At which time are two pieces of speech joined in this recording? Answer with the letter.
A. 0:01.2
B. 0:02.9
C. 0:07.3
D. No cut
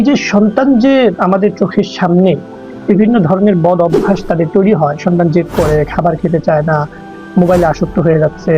A